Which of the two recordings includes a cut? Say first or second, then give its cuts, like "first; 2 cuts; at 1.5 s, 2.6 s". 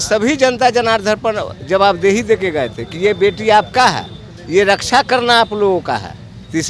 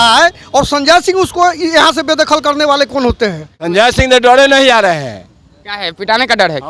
second; 1 cut; at 3.5 s